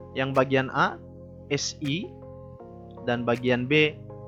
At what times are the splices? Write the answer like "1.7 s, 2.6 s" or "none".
none